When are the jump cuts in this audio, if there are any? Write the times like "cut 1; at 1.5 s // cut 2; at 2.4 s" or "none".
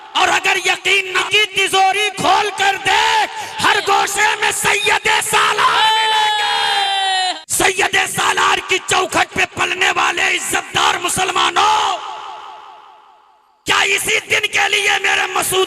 cut 1; at 1.2 s // cut 2; at 7.4 s